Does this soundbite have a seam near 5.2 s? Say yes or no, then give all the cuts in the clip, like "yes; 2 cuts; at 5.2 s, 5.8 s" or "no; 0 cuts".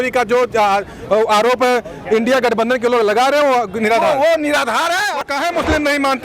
yes; 1 cut; at 5.2 s